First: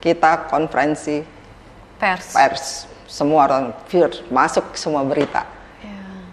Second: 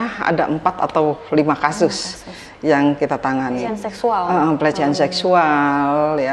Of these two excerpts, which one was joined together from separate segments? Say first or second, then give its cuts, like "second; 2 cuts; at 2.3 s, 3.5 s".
second; 1 cut; at 3.8 s